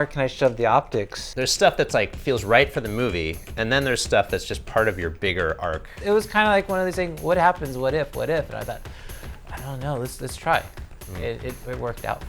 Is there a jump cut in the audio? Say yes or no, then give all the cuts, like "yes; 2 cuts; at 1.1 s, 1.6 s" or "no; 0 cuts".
yes; 2 cuts; at 1.2 s, 5.9 s